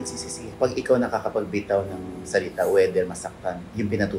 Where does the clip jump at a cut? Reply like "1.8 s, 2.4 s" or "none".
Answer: none